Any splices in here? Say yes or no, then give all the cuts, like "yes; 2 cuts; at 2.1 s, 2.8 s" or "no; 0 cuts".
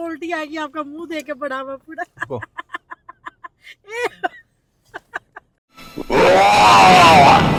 no; 0 cuts